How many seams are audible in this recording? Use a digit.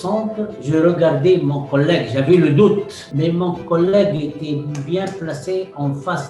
1